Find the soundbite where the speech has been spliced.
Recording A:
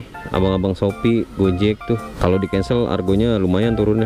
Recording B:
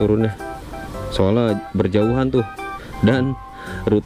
A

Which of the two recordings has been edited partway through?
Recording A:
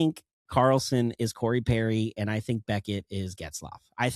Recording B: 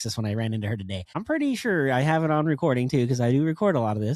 B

